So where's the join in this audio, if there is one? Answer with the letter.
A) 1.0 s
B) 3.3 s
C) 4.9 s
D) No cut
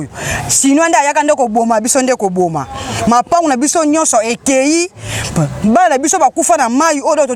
D